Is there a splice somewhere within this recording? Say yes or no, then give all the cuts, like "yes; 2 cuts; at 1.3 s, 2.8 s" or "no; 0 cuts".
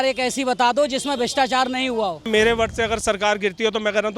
yes; 1 cut; at 2.3 s